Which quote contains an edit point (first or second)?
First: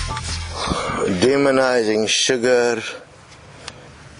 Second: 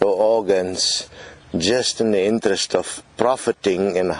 first